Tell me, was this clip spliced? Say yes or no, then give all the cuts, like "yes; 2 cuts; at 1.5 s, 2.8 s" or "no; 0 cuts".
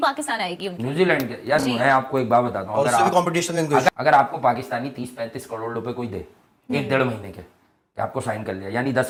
no; 0 cuts